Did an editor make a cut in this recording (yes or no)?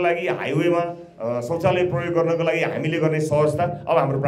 no